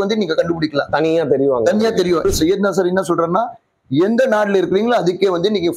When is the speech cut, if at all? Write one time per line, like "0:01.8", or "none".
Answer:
0:02.2